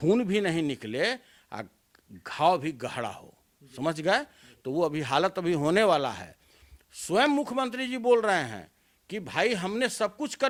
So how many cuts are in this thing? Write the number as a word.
zero